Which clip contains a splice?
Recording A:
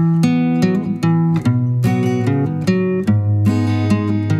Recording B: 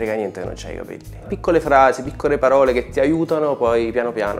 B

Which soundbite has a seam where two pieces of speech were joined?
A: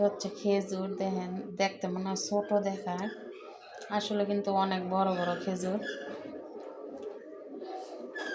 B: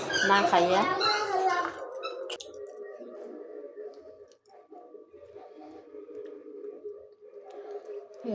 B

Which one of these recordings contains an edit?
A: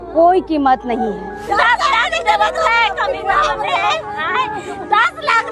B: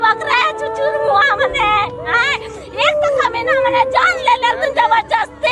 A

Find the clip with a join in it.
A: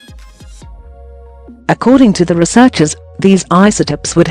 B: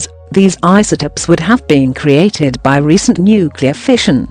A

